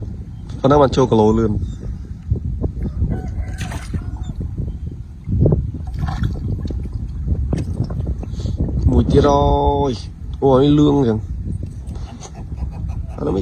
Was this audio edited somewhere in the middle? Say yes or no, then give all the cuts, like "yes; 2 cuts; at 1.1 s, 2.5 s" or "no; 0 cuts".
no; 0 cuts